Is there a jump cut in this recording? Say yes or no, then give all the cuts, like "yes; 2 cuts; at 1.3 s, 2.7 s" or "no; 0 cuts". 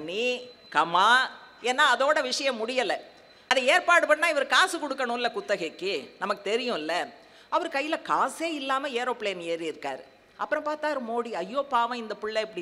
no; 0 cuts